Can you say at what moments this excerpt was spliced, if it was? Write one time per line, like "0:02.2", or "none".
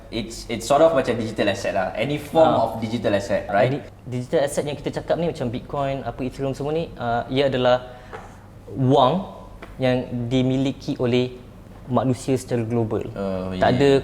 0:03.8